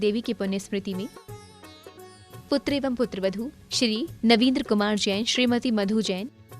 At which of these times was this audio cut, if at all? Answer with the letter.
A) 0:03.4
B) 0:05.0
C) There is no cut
A